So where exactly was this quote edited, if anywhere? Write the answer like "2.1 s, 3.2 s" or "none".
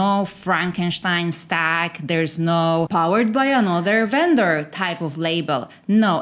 2.9 s